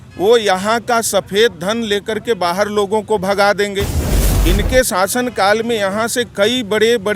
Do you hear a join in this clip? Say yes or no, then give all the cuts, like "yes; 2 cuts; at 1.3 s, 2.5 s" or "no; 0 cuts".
no; 0 cuts